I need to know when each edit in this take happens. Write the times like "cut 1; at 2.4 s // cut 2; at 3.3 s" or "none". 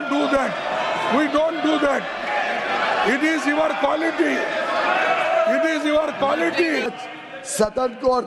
cut 1; at 6.9 s